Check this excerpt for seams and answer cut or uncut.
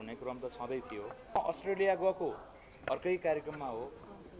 cut